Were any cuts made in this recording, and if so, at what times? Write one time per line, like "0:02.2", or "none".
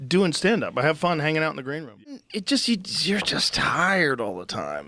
0:02.3